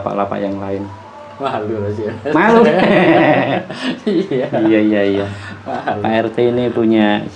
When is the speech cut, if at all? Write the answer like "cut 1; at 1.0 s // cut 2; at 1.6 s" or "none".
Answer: none